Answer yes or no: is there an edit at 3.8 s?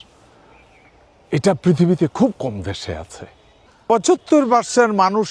yes